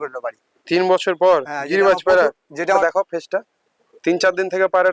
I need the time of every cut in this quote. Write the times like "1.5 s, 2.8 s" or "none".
2.8 s

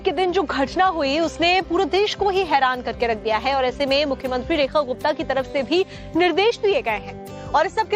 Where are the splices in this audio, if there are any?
2.4 s

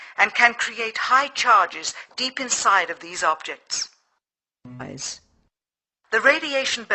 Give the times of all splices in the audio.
none

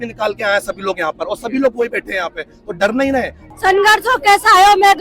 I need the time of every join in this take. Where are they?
3.4 s

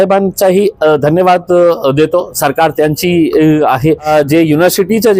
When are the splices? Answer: 4.1 s

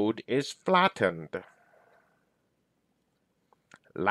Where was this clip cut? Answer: 2.7 s

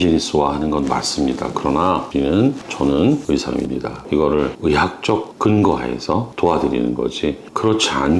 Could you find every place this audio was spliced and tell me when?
4.0 s, 6.3 s

